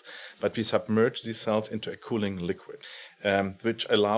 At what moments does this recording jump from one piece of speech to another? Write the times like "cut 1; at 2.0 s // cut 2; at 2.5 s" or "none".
cut 1; at 2.8 s